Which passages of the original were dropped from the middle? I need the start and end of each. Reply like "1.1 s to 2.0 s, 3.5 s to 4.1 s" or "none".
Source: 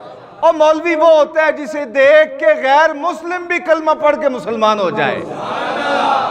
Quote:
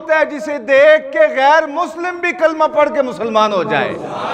none